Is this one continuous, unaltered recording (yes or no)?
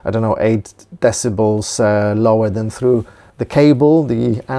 no